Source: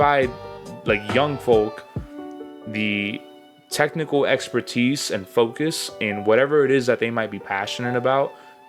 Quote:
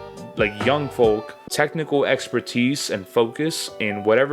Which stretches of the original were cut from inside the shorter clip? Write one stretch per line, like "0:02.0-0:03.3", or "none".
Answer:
0:01.9-0:03.6